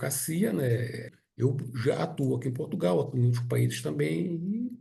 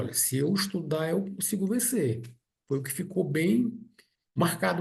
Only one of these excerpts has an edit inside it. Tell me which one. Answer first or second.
first